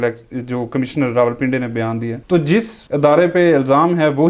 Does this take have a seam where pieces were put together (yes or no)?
yes